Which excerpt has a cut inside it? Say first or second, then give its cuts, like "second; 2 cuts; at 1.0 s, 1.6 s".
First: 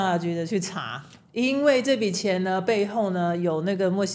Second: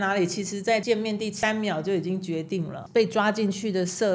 second; 2 cuts; at 1.0 s, 2.8 s